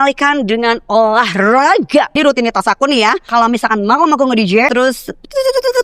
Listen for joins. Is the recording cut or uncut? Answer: cut